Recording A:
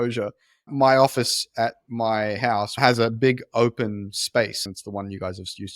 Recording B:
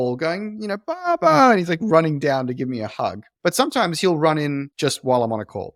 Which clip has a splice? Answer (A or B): A